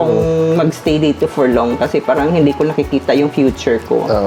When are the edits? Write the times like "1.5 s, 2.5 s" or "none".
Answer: none